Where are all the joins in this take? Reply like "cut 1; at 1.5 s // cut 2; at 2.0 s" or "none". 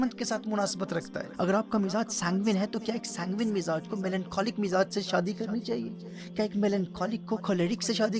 cut 1; at 1.2 s